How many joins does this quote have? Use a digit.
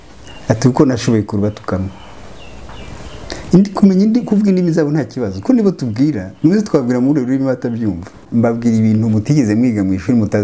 1